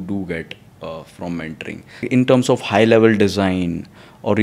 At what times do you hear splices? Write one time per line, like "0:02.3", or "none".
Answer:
0:02.0

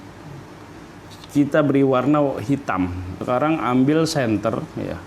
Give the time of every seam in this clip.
0:01.1
0:03.1

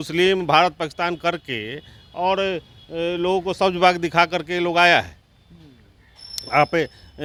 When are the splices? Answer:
none

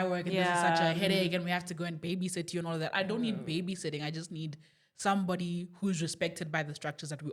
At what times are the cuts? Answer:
none

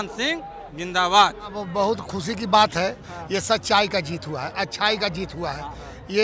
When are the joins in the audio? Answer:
0:01.6

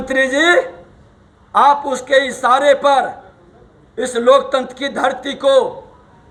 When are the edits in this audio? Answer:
none

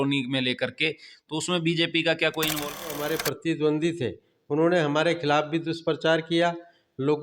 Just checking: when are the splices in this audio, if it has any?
0:03.0

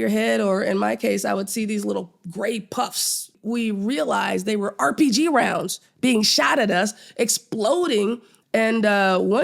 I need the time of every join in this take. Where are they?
0:03.3
0:08.3

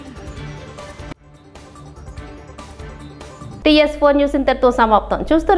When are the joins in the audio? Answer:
none

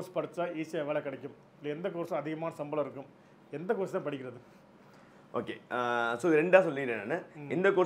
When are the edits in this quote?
none

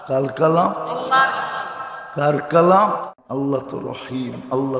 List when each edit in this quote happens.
0:03.2

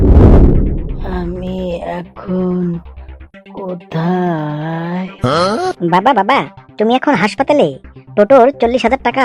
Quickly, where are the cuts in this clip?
none

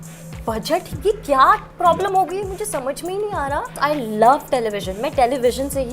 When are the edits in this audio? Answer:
0:03.8

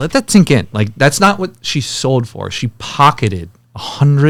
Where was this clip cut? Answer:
none

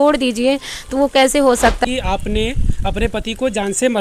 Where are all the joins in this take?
0:01.9

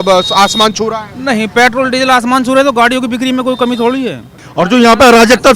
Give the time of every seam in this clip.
0:04.4

